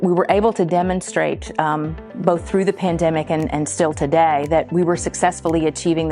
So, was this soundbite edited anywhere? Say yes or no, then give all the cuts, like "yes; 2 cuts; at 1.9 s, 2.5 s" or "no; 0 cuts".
no; 0 cuts